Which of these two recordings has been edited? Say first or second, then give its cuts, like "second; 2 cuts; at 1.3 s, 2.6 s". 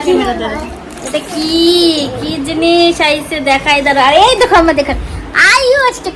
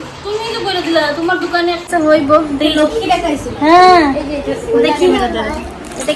second; 1 cut; at 1.9 s